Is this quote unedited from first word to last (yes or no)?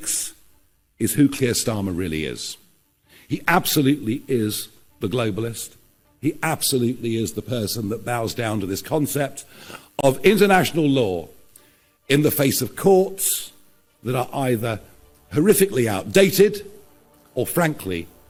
yes